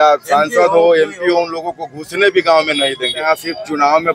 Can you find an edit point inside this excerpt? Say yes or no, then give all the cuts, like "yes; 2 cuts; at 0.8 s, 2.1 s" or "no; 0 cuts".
yes; 1 cut; at 3.2 s